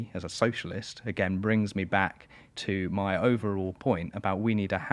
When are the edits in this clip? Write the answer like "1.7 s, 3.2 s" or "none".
none